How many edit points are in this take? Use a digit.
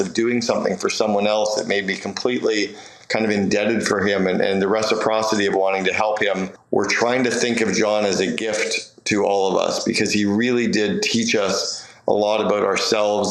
1